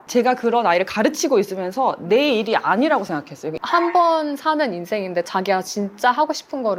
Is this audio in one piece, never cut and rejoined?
no; 1 cut; at 3.6 s

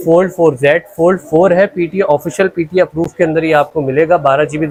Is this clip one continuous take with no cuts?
yes; 0 cuts

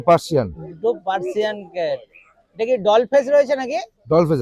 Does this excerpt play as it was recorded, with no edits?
yes; 0 cuts

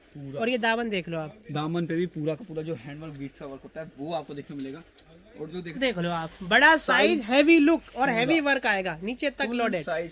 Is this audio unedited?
no; 1 cut; at 5.8 s

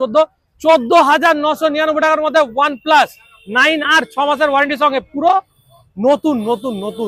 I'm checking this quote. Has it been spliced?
no; 0 cuts

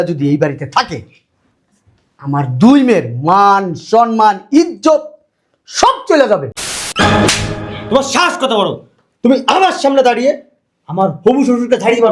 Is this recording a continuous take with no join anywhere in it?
no; 1 cut; at 6.7 s

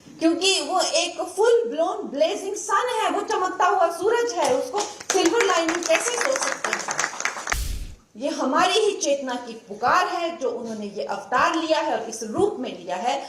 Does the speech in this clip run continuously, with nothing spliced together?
no; 1 cut; at 7.6 s

